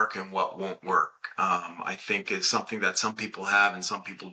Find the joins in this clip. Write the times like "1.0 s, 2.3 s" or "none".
none